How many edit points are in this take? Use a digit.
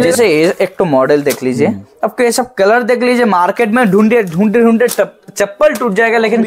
0